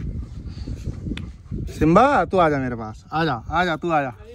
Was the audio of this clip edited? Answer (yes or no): no